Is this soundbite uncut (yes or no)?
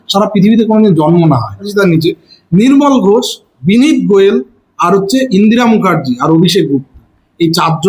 no